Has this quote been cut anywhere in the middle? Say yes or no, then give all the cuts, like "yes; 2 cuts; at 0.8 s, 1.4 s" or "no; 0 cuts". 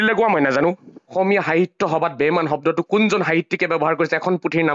yes; 1 cut; at 1.1 s